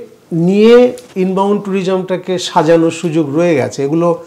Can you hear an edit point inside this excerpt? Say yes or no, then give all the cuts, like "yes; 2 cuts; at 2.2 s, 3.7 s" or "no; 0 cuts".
no; 0 cuts